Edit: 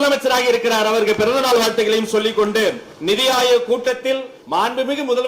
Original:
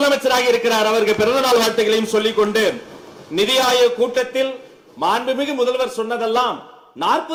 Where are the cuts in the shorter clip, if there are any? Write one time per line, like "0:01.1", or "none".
0:02.9
0:04.3